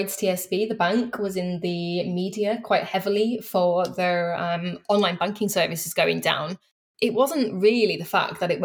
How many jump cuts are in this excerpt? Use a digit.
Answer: 1